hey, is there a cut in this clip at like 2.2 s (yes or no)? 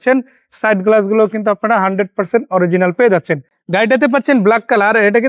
no